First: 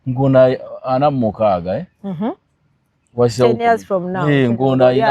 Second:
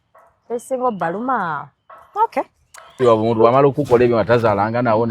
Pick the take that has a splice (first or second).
second